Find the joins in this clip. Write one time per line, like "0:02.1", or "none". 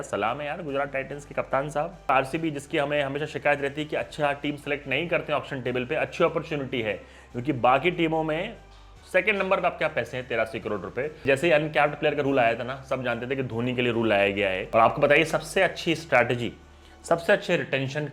0:02.1
0:11.2
0:14.6